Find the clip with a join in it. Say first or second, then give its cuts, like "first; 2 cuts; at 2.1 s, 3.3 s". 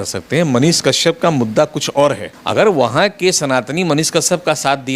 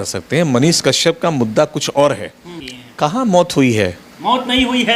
first; 1 cut; at 2.3 s